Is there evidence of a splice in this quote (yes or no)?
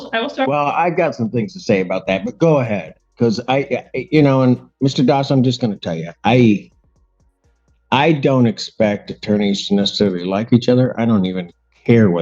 no